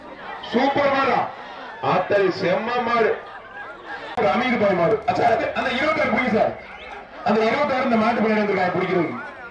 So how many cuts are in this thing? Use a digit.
1